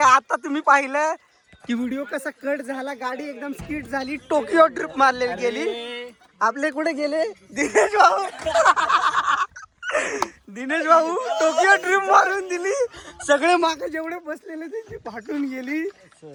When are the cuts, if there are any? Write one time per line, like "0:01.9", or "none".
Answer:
none